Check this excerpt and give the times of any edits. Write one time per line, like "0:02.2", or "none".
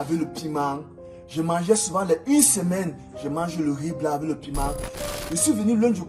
0:05.0